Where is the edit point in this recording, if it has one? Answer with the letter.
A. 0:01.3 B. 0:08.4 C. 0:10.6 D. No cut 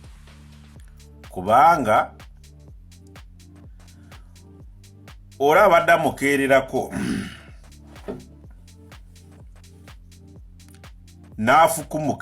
A